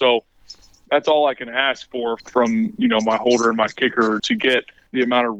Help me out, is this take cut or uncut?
cut